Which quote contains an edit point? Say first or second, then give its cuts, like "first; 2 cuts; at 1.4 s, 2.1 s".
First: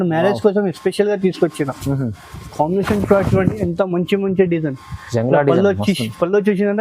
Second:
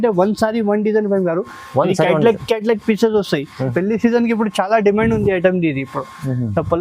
second; 1 cut; at 3.7 s